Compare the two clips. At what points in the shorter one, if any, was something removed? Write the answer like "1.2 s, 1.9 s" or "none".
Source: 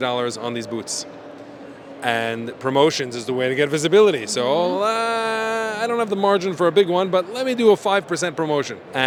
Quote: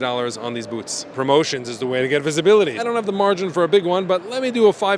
1.1 s, 2.8 s